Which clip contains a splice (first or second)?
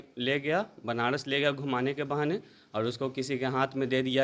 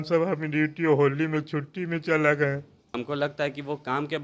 second